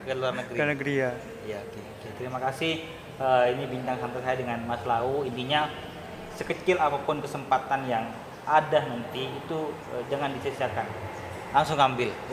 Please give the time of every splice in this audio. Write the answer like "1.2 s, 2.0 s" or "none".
none